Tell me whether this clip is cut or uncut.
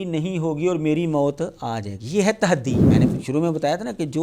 cut